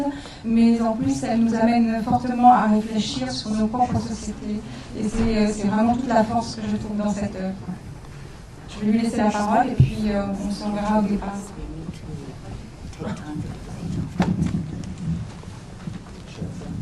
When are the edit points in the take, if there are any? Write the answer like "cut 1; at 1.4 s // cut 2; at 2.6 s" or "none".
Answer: cut 1; at 3.8 s